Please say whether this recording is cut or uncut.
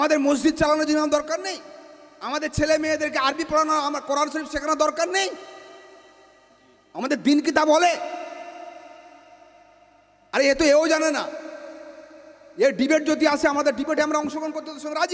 uncut